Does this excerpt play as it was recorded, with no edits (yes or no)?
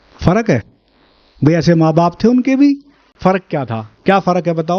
no